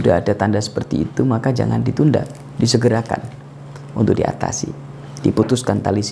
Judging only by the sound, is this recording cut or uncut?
uncut